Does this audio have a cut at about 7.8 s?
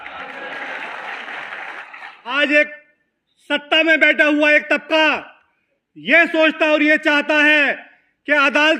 no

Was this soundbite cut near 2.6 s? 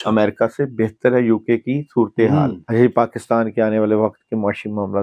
yes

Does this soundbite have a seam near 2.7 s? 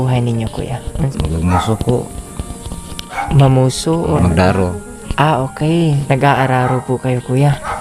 no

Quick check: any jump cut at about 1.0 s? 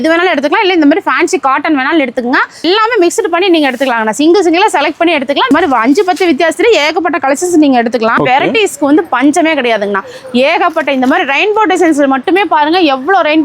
no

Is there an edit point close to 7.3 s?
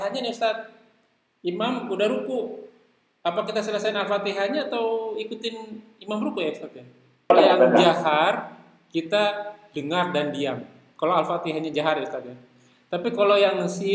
yes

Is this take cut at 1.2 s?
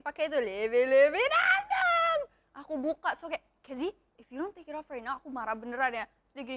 no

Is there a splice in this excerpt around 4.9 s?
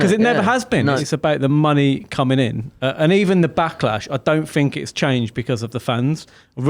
no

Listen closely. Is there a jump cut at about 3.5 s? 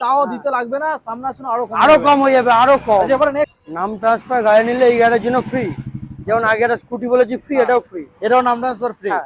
yes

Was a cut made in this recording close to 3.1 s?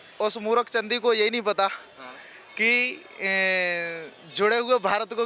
no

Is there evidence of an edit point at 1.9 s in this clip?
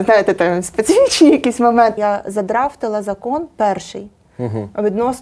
yes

